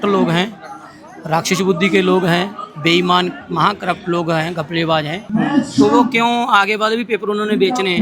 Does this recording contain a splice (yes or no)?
yes